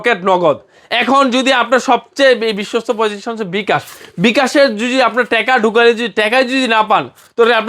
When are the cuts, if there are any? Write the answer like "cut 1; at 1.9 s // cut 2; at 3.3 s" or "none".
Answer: none